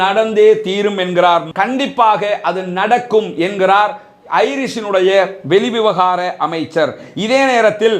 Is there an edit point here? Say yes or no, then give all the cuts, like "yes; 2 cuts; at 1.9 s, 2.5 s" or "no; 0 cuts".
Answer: no; 0 cuts